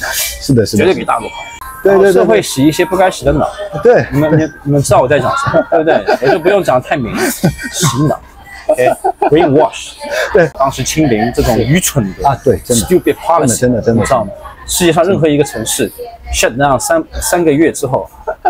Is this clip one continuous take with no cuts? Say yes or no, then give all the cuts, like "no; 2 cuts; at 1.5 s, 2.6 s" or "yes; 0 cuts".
no; 2 cuts; at 1.5 s, 10.6 s